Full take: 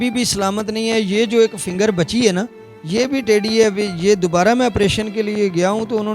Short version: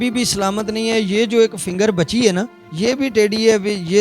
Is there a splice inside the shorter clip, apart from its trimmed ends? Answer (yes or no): yes